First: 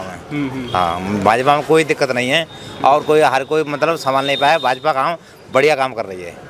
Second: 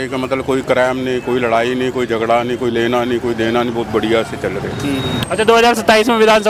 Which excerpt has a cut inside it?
second; 1 cut; at 5.2 s

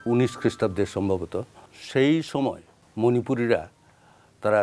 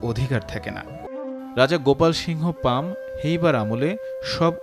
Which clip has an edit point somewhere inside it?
second; 1 cut; at 1.1 s

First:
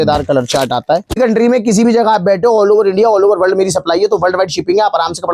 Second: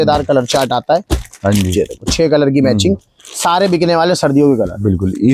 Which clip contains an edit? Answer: first; 1 cut; at 1.2 s

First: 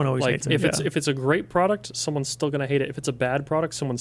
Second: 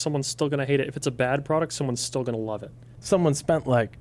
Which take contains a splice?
second; 1 cut; at 2.9 s

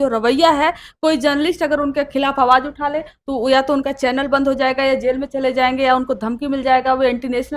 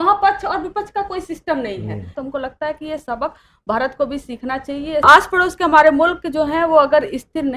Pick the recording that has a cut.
second; 2 cuts; at 2.2 s, 5.0 s

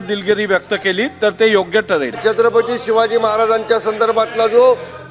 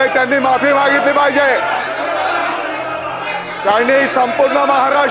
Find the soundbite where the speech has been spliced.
first; 1 cut; at 2.2 s

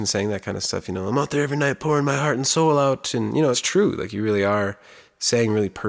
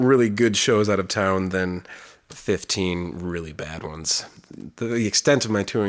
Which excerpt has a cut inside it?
second; 1 cut; at 4.5 s

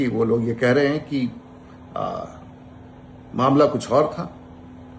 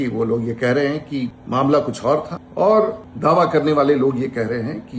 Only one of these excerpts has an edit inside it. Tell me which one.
second; 3 cuts; at 1.4 s, 2.4 s, 3.1 s

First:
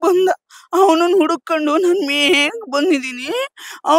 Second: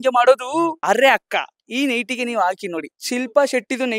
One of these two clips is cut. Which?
second; 2 cuts; at 0.8 s, 2.9 s

